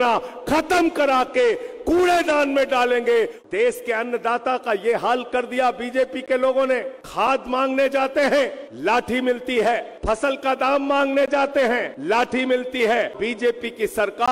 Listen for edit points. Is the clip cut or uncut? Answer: cut